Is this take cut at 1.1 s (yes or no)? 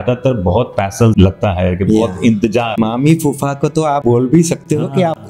yes